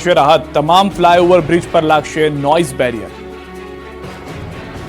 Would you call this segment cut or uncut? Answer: uncut